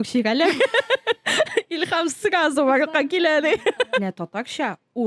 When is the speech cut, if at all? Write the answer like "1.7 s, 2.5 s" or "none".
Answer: 4.0 s